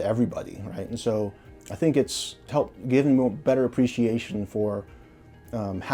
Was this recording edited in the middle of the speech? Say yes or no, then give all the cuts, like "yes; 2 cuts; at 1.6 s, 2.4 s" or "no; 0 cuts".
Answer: no; 0 cuts